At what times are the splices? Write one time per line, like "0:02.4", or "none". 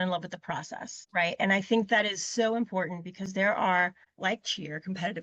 0:01.0
0:04.0